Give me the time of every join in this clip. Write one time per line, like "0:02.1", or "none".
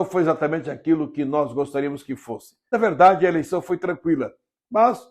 0:02.5

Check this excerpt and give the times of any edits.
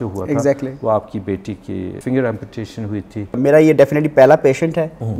0:01.9
0:03.4

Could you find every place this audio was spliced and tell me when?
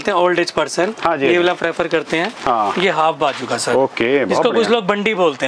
none

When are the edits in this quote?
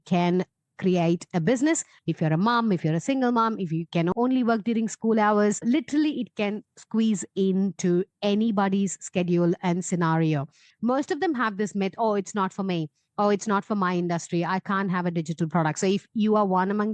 0:01.9
0:04.1
0:10.6

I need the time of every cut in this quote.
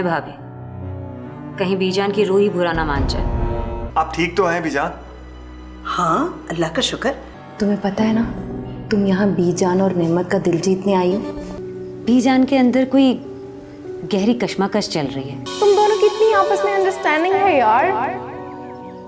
0:03.8
0:07.3
0:11.6
0:15.4

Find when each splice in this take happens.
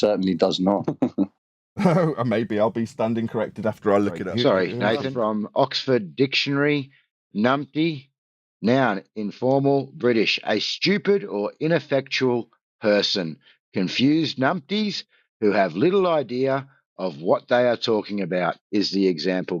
0:00.9
0:04.2
0:05.1

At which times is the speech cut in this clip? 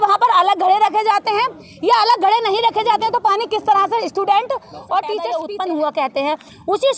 0:05.3

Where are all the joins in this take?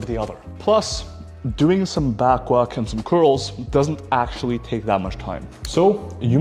none

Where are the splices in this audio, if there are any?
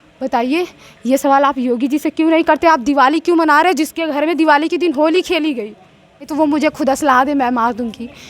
0:06.3

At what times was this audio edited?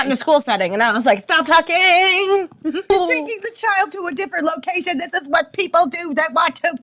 0:02.9

